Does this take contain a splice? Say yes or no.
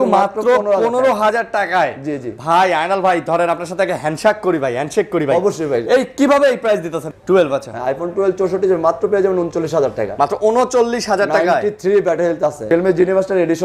yes